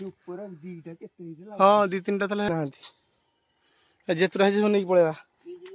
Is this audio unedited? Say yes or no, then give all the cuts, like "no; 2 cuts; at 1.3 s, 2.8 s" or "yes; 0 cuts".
no; 1 cut; at 2.5 s